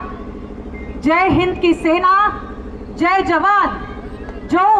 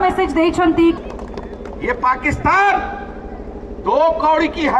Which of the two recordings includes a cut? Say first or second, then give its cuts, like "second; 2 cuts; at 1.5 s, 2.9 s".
second; 1 cut; at 1.0 s